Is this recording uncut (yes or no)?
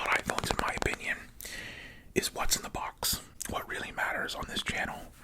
no